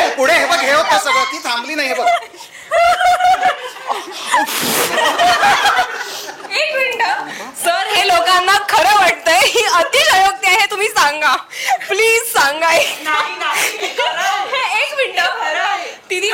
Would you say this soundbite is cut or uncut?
uncut